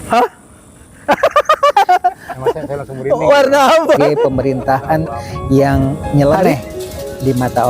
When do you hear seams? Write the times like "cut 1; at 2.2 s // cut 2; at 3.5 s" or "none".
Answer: cut 1; at 4.3 s